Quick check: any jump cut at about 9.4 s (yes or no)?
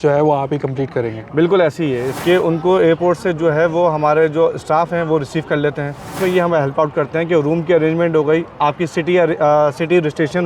no